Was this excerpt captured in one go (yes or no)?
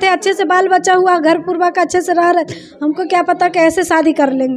yes